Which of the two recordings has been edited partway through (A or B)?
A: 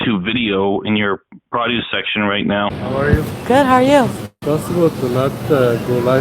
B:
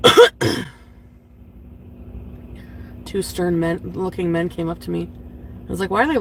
A